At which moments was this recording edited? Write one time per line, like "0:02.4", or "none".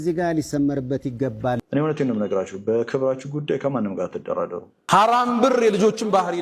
0:01.6
0:04.8